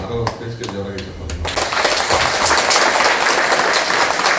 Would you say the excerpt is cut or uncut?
uncut